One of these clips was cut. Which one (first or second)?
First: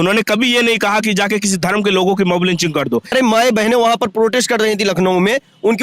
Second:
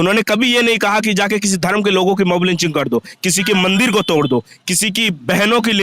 first